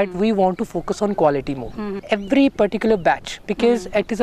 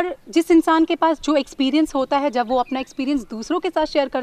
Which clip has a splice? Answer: first; 1 cut; at 1.9 s

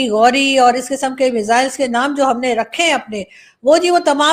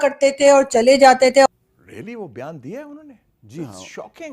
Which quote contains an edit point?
second; 1 cut; at 1.5 s

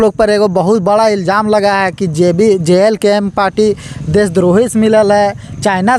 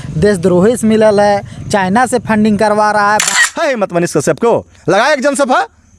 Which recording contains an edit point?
second; 1 cut; at 3.3 s

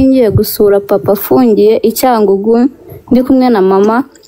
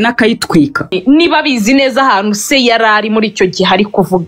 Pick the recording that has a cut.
second; 1 cut; at 0.9 s

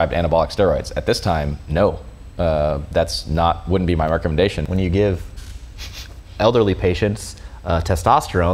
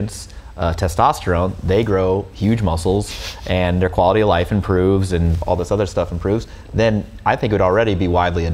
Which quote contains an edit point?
first; 1 cut; at 4.6 s

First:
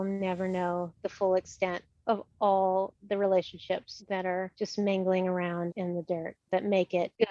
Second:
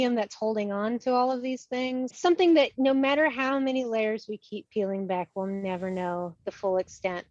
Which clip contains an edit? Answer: second; 1 cut; at 2.1 s

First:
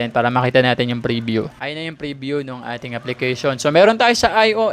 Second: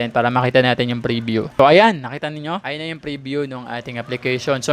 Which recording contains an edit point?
first; 1 cut; at 1.5 s

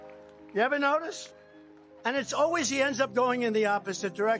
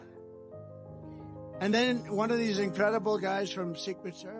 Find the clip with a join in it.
second; 1 cut; at 1.7 s

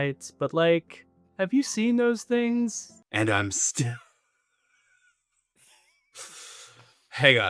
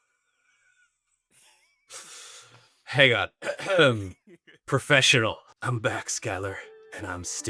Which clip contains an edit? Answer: first; 1 cut; at 2.9 s

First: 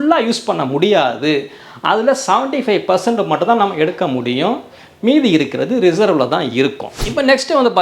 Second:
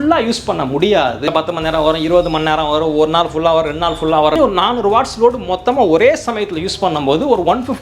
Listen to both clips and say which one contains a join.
second; 2 cuts; at 1.2 s, 4.3 s

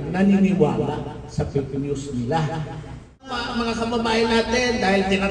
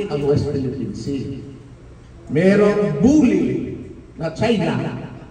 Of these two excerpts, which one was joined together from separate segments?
first; 1 cut; at 3.2 s

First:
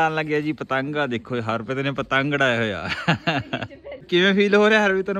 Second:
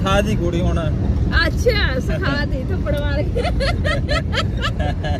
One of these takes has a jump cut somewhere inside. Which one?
first; 1 cut; at 4.0 s

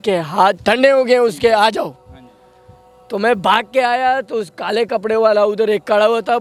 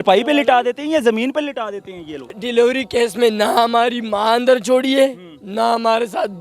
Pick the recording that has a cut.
second; 1 cut; at 2.4 s

